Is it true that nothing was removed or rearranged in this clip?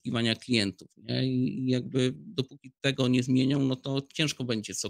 yes; 0 cuts

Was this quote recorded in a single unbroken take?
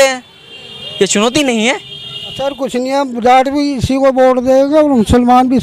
no; 1 cut; at 2.5 s

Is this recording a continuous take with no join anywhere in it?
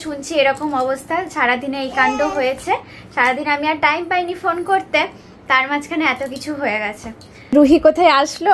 yes; 0 cuts

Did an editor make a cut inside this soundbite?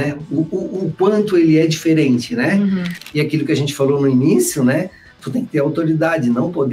yes; 1 cut; at 3.0 s

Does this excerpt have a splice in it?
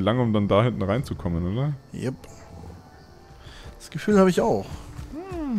no; 0 cuts

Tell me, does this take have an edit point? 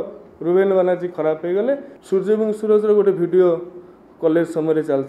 yes; 1 cut; at 1.9 s

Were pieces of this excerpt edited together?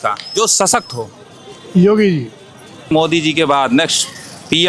yes; 1 cut; at 2.9 s

